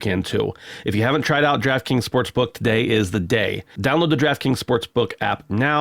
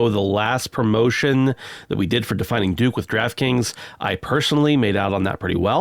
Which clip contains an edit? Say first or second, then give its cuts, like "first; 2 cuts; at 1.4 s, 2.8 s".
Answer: first; 1 cut; at 3.7 s